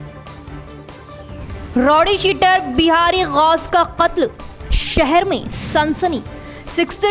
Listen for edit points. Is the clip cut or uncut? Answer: cut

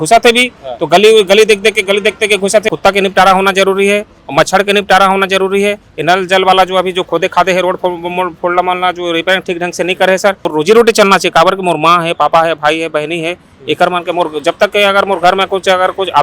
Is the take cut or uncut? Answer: cut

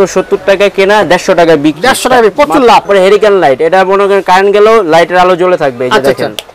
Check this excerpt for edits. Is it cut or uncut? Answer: cut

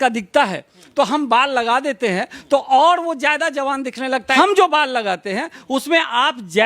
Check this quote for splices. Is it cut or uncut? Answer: cut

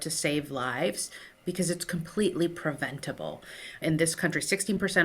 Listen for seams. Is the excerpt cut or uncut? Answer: cut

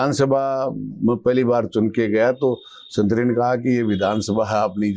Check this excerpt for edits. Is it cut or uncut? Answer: uncut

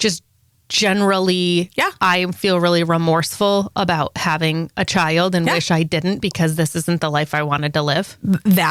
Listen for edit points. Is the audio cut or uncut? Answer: uncut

